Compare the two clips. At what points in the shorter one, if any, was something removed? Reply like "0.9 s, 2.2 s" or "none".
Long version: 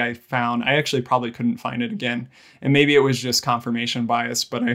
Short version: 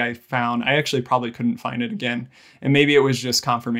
none